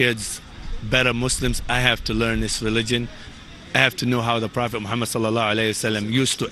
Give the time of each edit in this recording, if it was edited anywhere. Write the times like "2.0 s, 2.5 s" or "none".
2.5 s